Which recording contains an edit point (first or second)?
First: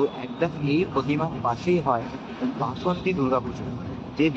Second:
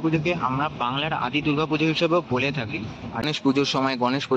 second